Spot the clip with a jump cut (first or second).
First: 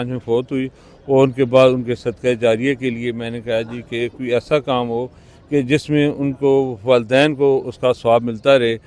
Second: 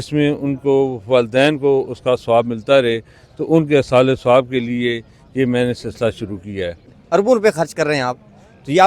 second